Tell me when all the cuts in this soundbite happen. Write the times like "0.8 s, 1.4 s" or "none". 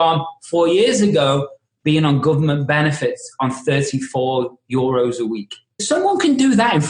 5.8 s